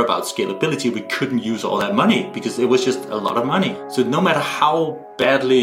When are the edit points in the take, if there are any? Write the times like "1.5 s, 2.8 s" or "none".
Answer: 3.8 s